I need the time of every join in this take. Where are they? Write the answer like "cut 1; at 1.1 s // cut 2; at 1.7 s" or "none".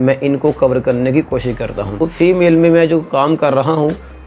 cut 1; at 2.1 s